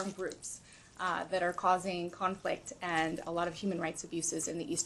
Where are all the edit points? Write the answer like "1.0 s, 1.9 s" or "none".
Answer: none